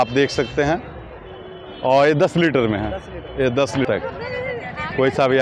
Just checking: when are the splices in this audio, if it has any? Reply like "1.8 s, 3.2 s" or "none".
3.9 s